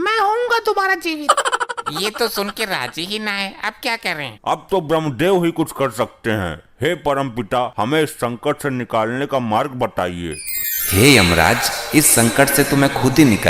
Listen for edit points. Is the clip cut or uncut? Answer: uncut